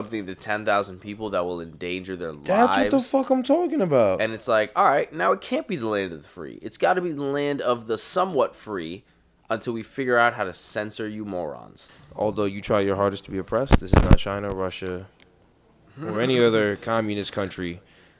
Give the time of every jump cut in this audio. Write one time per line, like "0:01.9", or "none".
0:12.0